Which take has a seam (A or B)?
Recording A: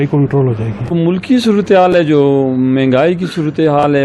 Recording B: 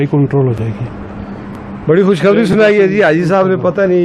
A